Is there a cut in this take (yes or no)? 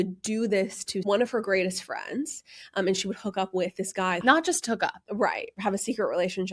yes